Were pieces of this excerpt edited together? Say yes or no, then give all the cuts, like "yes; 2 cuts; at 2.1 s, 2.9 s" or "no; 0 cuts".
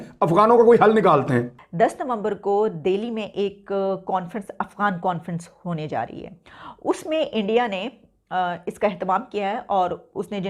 yes; 1 cut; at 1.6 s